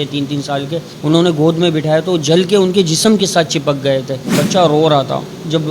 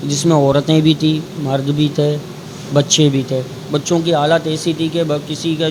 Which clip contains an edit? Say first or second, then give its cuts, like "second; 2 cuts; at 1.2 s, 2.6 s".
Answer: first; 2 cuts; at 0.9 s, 4.3 s